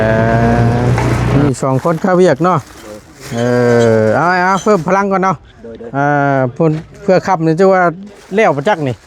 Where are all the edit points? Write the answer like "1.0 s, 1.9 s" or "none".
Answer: 1.3 s